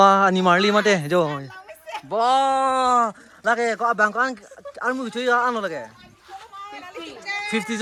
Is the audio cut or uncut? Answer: uncut